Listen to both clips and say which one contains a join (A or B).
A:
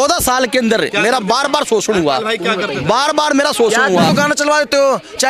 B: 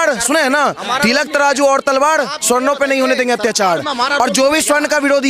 A